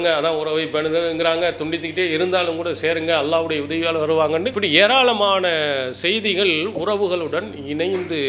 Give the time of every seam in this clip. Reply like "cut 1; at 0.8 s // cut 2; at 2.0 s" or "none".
cut 1; at 4.5 s